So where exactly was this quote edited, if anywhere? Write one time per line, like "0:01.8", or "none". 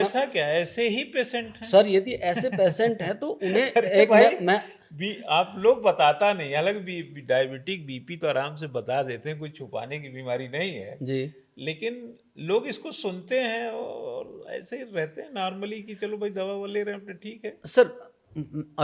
none